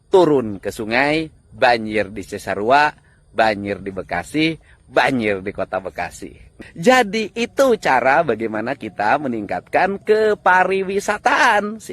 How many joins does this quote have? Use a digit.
1